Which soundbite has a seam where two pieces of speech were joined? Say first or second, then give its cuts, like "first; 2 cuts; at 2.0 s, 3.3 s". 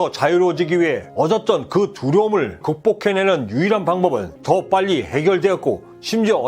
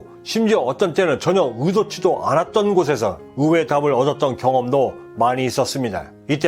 first; 1 cut; at 4.3 s